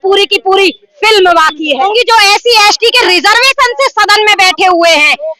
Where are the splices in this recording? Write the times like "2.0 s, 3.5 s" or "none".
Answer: 1.9 s